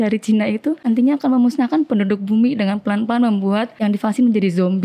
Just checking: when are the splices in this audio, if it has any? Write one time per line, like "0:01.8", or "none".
0:00.8
0:03.7